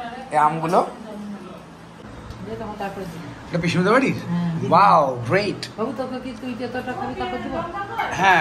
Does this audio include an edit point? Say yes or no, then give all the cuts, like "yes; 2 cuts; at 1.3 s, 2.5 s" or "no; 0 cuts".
yes; 1 cut; at 2.0 s